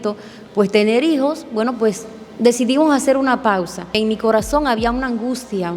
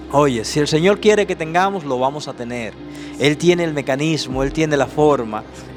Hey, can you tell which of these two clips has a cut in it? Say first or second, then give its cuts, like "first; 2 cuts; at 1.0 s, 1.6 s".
first; 1 cut; at 4.0 s